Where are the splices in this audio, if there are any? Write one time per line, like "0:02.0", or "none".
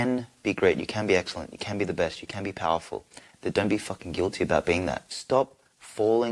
0:05.1